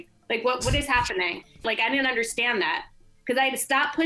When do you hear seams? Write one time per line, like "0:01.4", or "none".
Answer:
0:01.6